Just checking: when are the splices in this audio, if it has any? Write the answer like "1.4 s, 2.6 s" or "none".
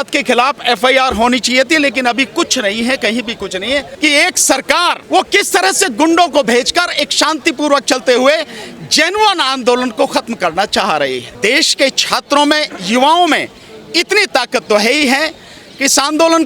3.9 s, 5.0 s, 11.3 s

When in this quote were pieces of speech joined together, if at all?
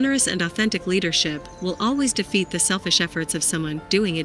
none

